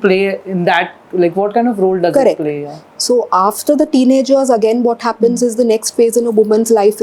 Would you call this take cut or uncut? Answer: uncut